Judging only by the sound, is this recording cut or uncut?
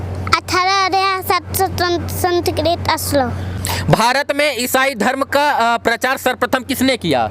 cut